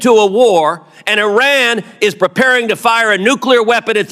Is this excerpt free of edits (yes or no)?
yes